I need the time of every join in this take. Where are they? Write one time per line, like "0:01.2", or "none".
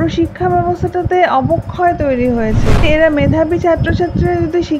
0:02.8